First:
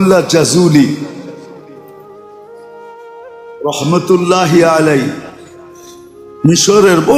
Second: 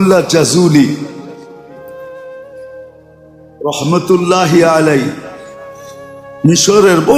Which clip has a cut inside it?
second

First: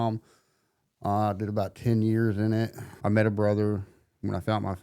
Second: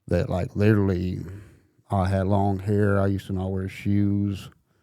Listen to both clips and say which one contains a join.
first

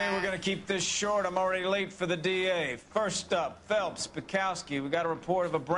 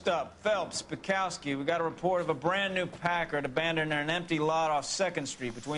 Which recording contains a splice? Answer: first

